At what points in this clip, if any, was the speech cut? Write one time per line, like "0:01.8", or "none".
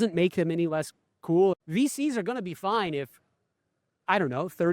0:01.6